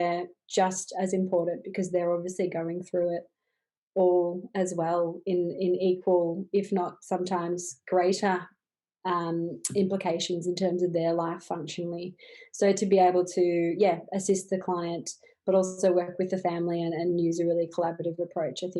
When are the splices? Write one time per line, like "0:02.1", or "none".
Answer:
none